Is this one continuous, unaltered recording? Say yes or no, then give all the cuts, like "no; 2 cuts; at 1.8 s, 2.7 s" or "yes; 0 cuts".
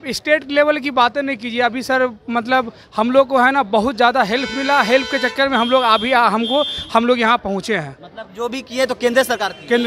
yes; 0 cuts